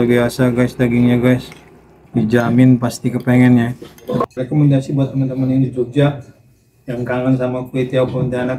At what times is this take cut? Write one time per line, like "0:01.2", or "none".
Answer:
0:04.2